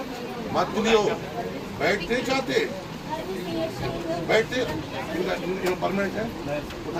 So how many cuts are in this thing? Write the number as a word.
zero